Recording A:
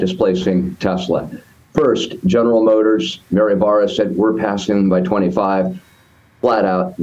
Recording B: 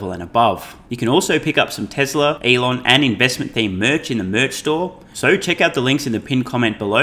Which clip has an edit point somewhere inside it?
B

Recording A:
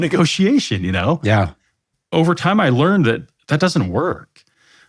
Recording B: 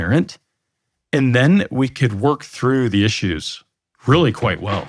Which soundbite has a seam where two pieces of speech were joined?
A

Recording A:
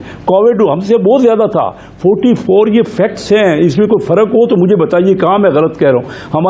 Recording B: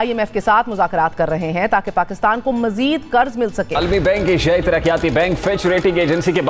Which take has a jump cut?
B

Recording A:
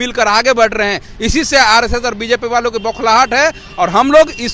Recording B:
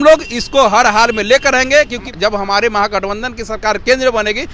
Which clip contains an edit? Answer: B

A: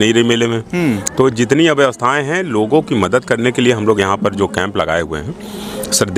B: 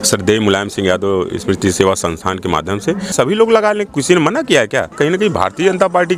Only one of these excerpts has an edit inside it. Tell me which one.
B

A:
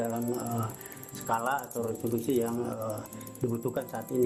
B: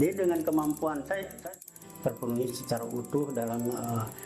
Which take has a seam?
B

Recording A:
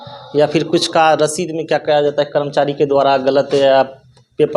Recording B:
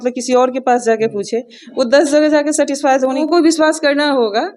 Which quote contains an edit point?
B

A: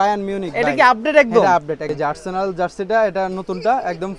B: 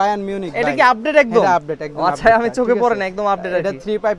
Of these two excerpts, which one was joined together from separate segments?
A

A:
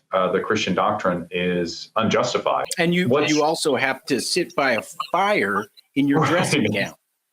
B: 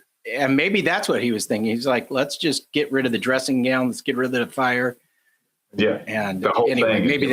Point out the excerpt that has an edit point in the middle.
A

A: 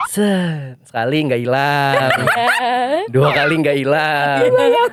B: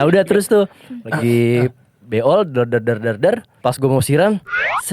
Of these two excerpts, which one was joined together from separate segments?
B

